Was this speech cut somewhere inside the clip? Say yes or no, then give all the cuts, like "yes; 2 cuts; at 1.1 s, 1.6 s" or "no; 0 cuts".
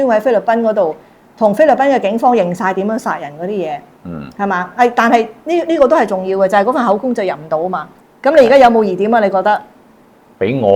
yes; 1 cut; at 7.9 s